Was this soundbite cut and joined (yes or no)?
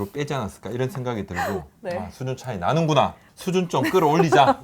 yes